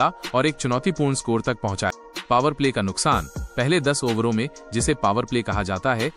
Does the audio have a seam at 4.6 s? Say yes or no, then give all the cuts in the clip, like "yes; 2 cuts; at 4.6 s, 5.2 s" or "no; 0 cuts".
no; 1 cut; at 2.1 s